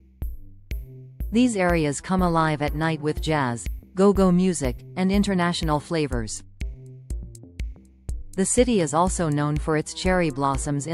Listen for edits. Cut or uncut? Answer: cut